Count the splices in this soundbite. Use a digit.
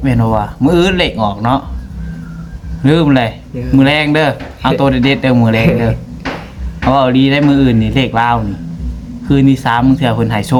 0